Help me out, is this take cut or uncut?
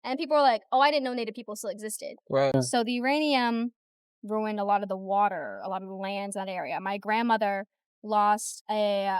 cut